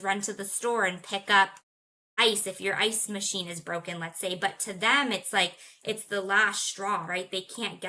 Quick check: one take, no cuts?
yes; 0 cuts

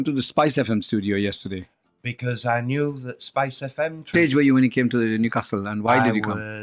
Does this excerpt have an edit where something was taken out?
no; 0 cuts

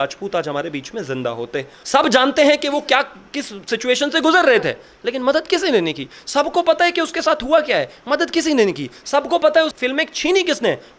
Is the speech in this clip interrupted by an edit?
yes; 1 cut; at 1.7 s

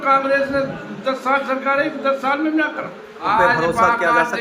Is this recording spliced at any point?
yes; 1 cut; at 3.3 s

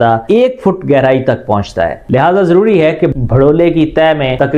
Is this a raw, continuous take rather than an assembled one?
yes; 0 cuts

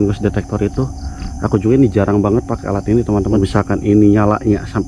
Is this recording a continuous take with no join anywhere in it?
no; 1 cut; at 3.4 s

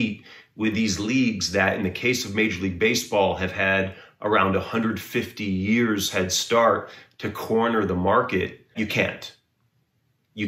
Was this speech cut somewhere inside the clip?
yes; 1 cut; at 8.7 s

